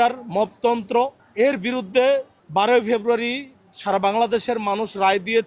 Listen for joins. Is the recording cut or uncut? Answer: cut